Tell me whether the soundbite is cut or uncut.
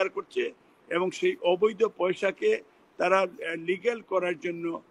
uncut